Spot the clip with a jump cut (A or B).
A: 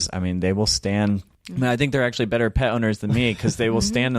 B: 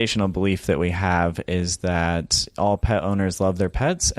A